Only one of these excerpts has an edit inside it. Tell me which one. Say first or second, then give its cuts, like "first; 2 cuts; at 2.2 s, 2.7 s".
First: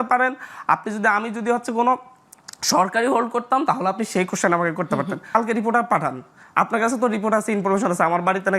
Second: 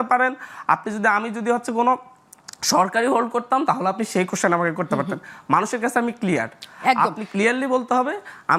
first; 1 cut; at 5.3 s